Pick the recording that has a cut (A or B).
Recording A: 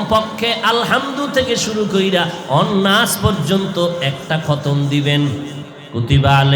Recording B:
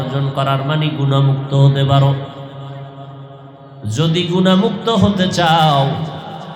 A